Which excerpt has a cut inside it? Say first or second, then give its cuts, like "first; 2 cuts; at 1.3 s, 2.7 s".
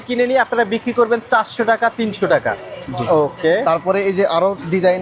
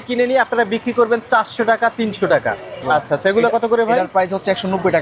second; 1 cut; at 2.8 s